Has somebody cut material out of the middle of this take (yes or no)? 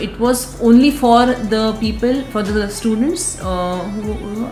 no